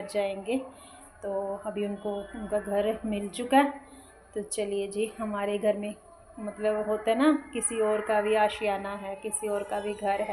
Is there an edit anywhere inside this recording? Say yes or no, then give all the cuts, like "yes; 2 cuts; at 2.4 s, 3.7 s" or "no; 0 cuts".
no; 0 cuts